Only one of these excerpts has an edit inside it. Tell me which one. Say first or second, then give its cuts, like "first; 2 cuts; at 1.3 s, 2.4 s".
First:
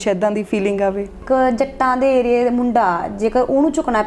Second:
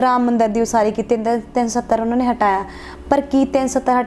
first; 1 cut; at 1.2 s